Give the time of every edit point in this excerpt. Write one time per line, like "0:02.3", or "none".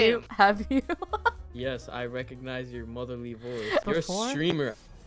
0:03.8